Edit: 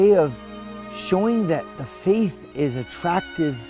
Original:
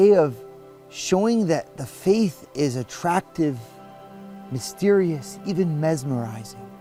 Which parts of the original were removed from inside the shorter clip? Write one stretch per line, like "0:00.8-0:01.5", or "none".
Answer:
none